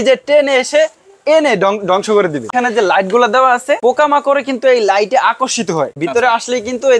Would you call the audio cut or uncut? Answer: cut